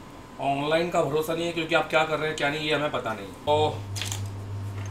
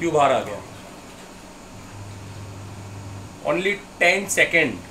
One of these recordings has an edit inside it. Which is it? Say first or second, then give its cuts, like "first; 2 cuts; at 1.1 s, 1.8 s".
first; 1 cut; at 3.5 s